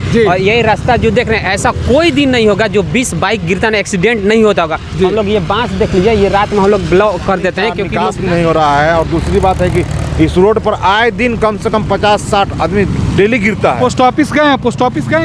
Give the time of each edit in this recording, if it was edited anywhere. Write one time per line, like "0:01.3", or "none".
0:07.9